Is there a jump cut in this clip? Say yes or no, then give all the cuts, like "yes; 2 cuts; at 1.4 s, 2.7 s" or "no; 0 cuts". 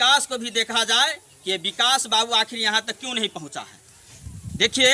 no; 0 cuts